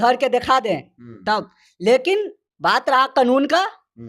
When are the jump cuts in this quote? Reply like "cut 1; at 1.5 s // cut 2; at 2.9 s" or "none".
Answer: none